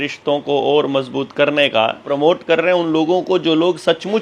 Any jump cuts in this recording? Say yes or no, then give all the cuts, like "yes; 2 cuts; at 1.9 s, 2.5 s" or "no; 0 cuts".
yes; 1 cut; at 2.1 s